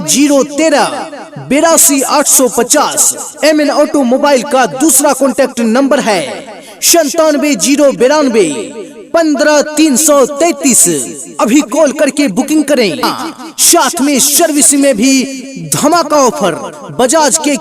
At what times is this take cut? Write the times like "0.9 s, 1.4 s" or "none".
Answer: 13.0 s

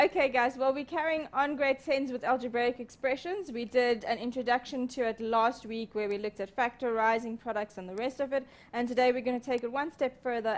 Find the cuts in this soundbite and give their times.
6.4 s

